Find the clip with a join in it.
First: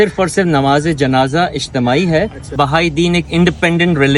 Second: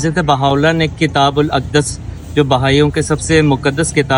first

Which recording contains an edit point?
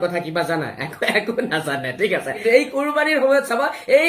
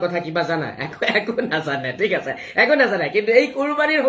first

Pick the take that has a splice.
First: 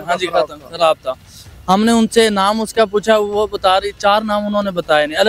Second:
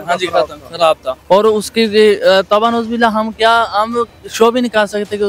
second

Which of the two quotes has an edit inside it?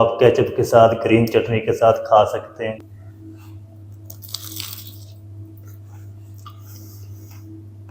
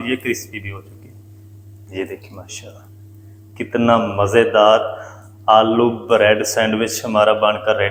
first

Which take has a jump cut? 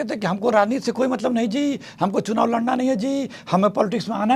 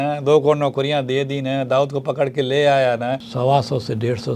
second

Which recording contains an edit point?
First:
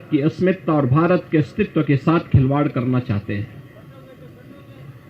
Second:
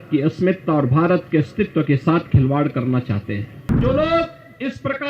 second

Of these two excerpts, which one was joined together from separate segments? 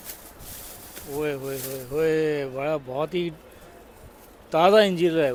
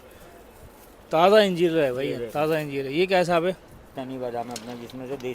second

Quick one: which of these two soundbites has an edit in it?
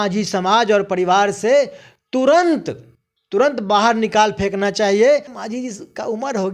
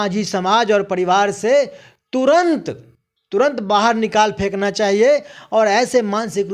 first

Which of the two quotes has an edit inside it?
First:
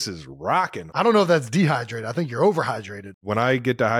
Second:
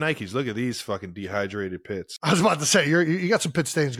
first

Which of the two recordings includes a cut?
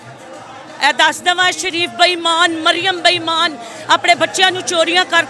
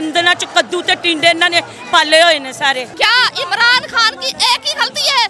second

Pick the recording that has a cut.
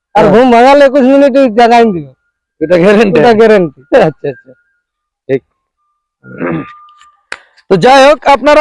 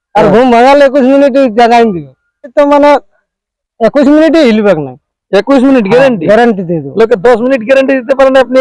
second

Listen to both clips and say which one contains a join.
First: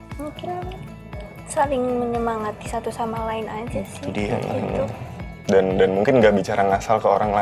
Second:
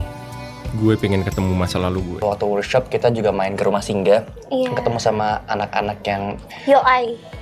second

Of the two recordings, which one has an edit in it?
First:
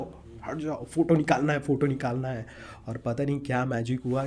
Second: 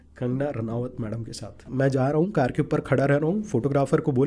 second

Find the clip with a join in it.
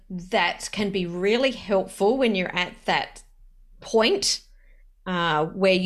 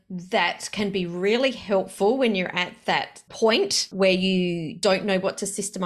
second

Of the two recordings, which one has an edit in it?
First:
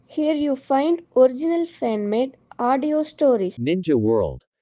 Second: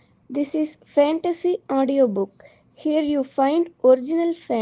first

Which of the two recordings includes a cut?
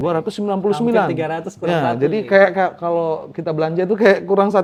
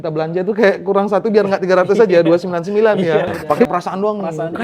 second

